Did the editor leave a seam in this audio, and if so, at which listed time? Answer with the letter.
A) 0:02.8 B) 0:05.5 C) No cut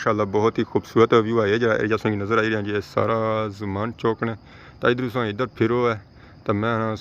C